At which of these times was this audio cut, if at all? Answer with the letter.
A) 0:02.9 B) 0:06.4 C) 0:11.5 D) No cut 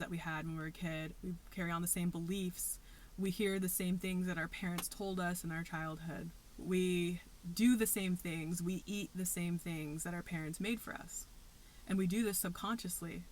B